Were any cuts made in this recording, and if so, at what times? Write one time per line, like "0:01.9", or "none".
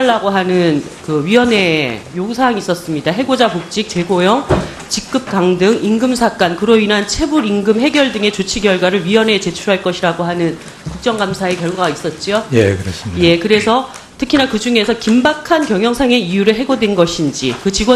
0:12.1